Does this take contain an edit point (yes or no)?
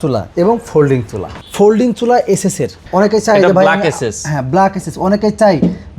yes